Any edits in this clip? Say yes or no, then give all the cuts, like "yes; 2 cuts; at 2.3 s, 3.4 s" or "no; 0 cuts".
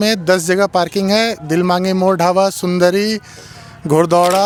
no; 0 cuts